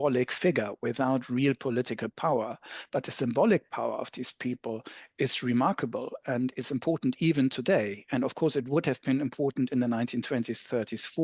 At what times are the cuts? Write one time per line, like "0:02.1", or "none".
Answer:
none